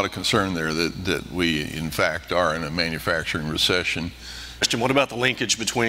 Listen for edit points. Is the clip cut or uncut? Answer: cut